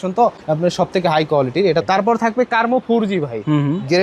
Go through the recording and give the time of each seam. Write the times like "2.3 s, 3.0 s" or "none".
1.8 s